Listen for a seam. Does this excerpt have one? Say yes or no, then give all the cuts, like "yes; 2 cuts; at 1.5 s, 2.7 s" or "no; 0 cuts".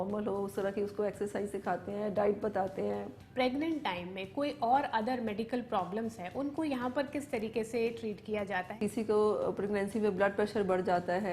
yes; 2 cuts; at 3.2 s, 8.8 s